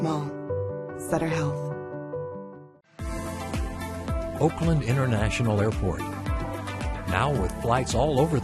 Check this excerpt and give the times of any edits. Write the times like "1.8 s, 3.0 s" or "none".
2.7 s